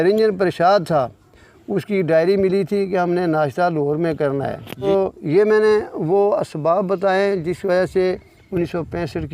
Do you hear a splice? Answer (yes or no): yes